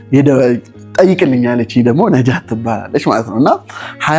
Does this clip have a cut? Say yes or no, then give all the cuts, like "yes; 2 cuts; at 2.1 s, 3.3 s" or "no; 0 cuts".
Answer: no; 0 cuts